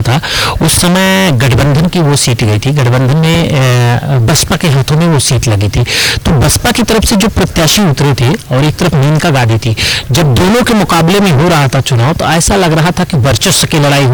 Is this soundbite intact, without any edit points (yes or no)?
yes